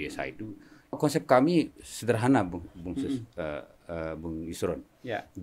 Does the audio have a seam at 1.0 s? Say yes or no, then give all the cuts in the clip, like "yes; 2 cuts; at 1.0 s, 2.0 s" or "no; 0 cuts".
yes; 1 cut; at 1.0 s